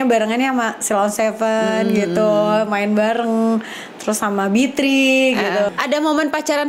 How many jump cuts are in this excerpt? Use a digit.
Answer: 1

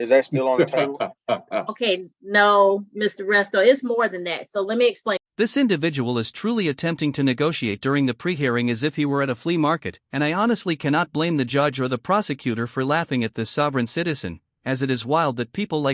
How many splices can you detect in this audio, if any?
0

